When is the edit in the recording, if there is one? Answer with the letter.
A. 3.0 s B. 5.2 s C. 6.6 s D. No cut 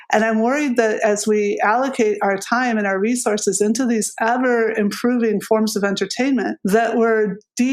C